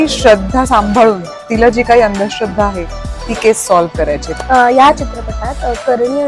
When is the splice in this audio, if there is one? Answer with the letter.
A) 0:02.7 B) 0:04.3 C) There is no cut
B